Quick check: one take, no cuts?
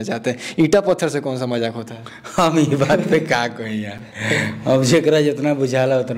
yes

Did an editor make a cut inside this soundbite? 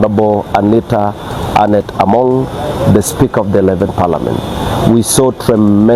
no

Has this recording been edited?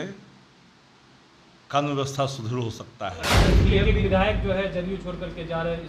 yes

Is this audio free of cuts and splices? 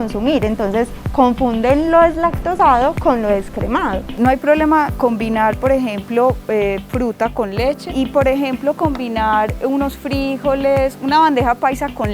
no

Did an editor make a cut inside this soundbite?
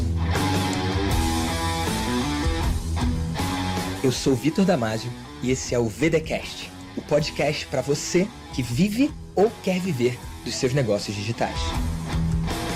no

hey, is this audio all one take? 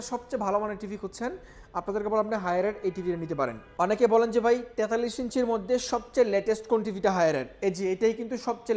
no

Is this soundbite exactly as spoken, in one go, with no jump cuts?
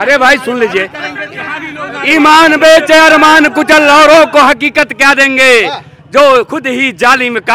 yes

